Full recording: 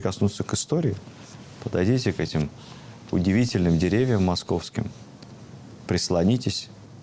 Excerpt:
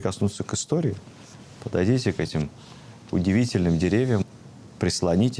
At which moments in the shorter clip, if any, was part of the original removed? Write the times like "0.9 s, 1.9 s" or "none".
4.2 s